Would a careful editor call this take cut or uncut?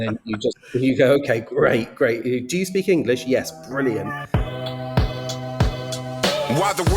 cut